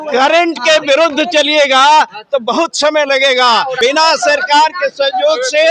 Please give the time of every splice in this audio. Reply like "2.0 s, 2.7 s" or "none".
3.7 s